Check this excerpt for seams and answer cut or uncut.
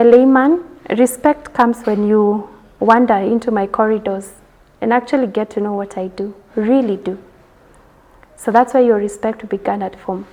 uncut